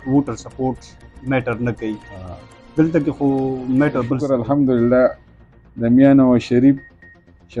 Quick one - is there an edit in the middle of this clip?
yes; 1 cut; at 4.2 s

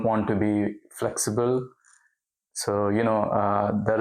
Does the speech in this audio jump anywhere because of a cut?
no; 0 cuts

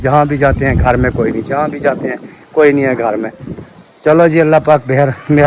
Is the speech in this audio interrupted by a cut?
no; 0 cuts

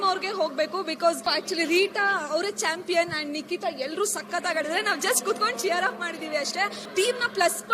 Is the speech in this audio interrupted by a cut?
yes; 2 cuts; at 1.3 s, 6.8 s

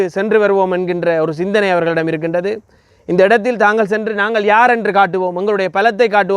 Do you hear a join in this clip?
no; 0 cuts

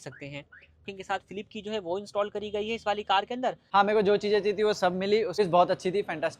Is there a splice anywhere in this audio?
yes; 3 cuts; at 0.9 s, 3.6 s, 5.4 s

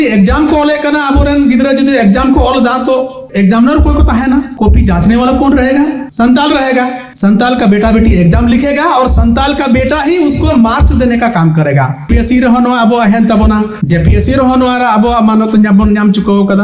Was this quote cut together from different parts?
yes; 6 cuts; at 3.2 s, 4.5 s, 6.0 s, 7.0 s, 12.1 s, 13.8 s

